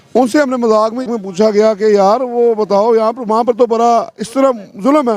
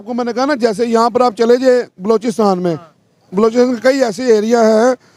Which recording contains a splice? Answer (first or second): first